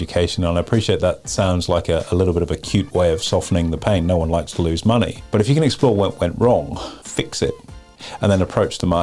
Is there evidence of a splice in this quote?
yes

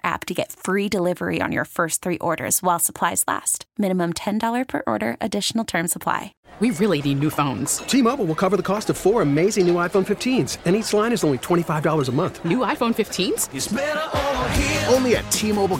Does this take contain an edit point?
yes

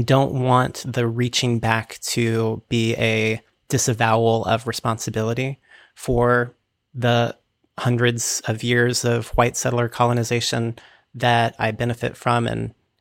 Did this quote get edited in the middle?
no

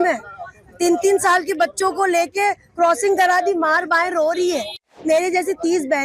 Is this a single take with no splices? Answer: no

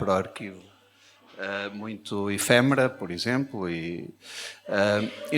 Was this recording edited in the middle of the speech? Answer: no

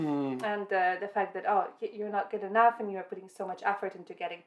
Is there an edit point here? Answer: no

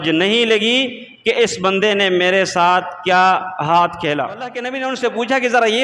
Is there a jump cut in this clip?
yes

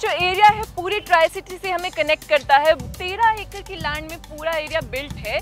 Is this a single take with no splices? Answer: no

